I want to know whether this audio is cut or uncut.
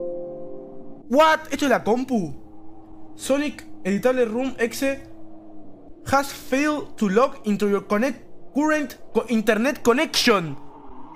cut